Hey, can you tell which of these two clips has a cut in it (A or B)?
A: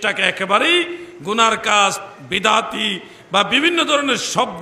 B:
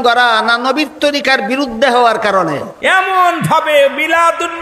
B